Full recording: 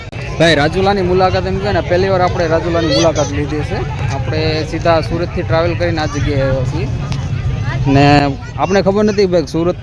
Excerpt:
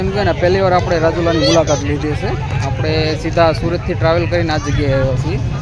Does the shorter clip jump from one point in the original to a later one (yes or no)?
no